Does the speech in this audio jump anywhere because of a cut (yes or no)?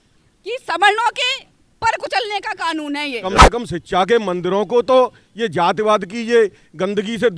yes